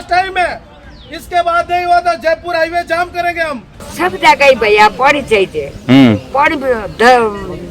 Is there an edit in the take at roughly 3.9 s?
yes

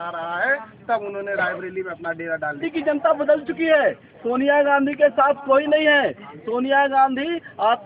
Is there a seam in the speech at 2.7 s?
yes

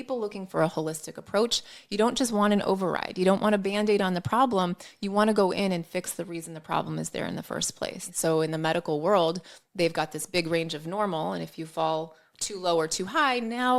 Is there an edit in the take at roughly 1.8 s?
no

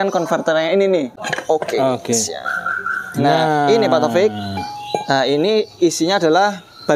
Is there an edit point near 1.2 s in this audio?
yes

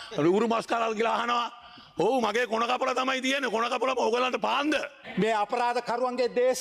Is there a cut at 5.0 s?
yes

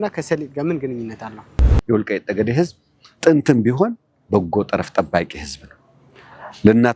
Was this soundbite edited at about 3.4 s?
no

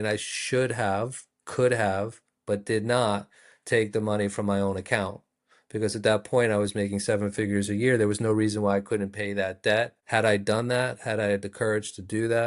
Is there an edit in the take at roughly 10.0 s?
yes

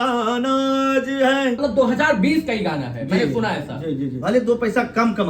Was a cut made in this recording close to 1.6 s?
yes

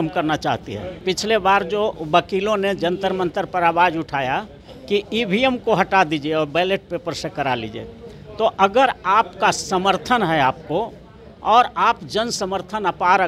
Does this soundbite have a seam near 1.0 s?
yes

